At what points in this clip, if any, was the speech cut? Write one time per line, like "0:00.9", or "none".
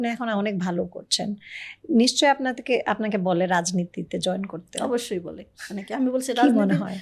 none